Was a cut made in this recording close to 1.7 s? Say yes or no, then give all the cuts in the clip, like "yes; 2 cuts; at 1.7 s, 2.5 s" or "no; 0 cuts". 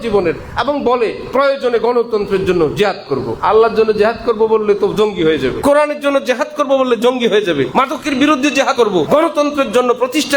no; 4 cuts; at 3.3 s, 5.6 s, 7.7 s, 8.8 s